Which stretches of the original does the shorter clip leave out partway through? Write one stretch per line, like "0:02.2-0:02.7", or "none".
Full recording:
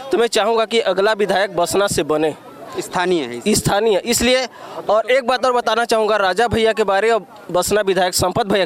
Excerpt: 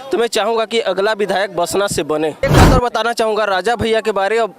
0:02.4-0:05.1